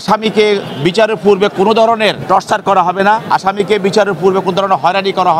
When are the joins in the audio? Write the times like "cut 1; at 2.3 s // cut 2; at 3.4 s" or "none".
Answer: cut 1; at 2.2 s // cut 2; at 3.2 s